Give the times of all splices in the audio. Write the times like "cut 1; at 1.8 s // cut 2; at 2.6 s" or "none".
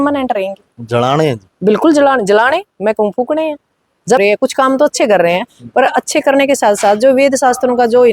cut 1; at 4.2 s